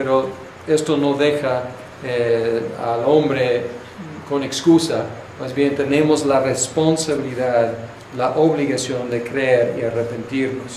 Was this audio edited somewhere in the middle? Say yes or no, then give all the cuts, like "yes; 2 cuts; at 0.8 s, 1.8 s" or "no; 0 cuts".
yes; 1 cut; at 7.6 s